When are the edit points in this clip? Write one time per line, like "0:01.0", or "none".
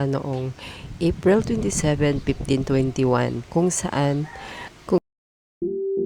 0:05.1